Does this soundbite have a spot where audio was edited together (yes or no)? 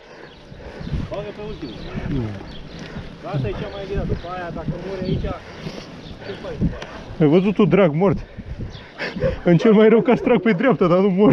no